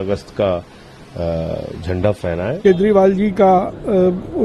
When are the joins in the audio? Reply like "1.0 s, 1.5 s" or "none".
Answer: 2.6 s